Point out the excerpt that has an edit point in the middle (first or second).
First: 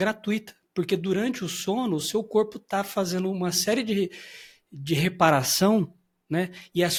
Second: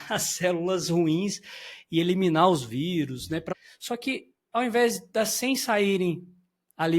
second